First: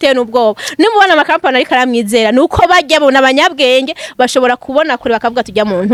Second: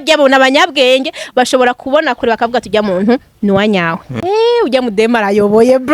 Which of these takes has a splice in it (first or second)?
second